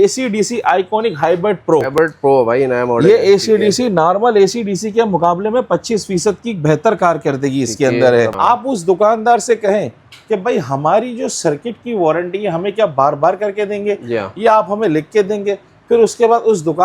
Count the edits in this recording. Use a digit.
2